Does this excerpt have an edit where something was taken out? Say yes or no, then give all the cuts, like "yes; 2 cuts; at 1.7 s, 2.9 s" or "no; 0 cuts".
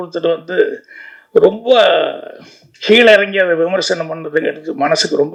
no; 0 cuts